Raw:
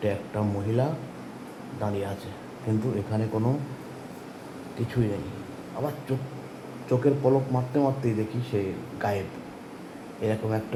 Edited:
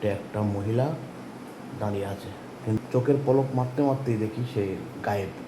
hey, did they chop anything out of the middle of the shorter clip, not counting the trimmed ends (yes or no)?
yes